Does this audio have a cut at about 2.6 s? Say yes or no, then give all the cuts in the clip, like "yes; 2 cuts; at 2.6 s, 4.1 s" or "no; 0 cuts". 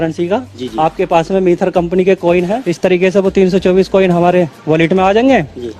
yes; 1 cut; at 2.6 s